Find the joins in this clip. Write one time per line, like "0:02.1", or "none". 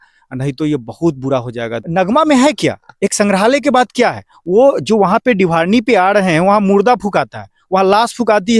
0:01.8